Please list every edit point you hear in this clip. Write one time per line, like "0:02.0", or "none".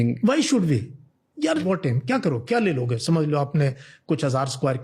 0:01.6